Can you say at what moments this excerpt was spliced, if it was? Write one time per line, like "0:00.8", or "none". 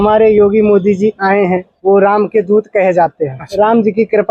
0:01.7
0:03.4